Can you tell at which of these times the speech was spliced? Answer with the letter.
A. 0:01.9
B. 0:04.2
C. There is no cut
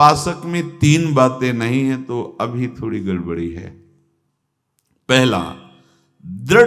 C